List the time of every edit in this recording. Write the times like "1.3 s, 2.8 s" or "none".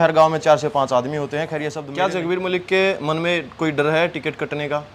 1.8 s

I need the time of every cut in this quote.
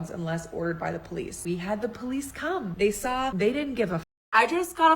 1.4 s, 2.7 s, 3.3 s, 4.1 s

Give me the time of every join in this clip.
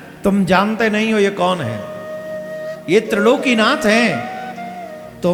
none

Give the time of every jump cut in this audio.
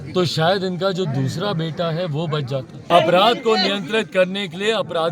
2.9 s

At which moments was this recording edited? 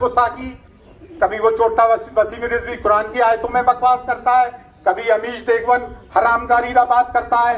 none

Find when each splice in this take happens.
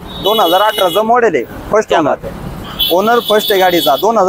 2.5 s

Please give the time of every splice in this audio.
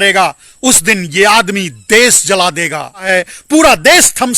3.1 s

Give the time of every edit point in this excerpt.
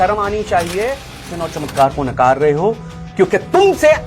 1.3 s

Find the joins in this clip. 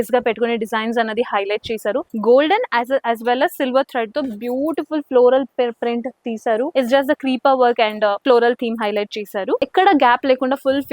2.1 s, 6.7 s, 9.6 s

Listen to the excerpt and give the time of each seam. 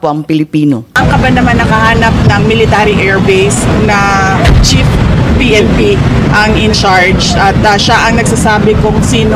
1.0 s

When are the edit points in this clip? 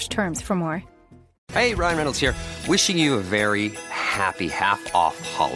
0.9 s

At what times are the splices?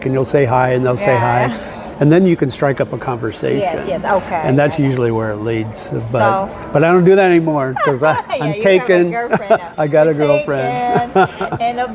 none

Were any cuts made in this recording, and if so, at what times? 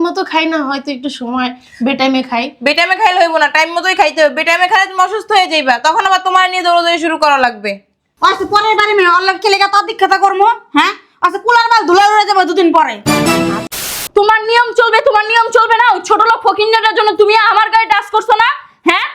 13.9 s

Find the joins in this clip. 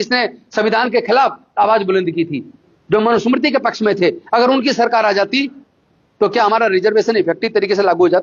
none

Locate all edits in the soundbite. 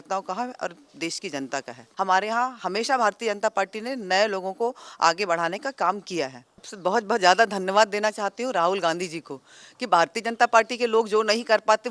1.8 s, 6.7 s

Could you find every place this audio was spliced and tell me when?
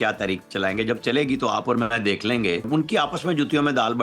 2.7 s

